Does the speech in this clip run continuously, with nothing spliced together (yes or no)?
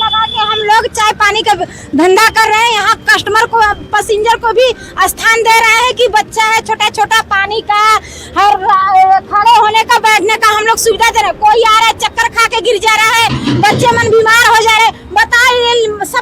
yes